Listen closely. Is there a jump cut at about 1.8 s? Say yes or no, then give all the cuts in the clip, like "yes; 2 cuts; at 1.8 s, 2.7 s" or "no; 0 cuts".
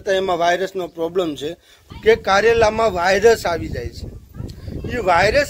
yes; 1 cut; at 1.8 s